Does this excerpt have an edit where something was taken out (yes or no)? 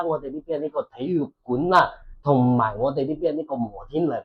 no